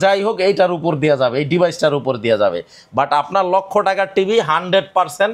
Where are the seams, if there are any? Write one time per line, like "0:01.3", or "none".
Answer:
none